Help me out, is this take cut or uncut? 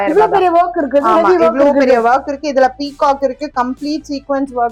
uncut